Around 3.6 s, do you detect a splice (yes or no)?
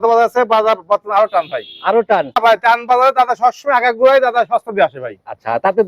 no